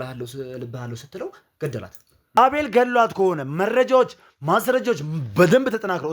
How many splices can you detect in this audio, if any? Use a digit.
1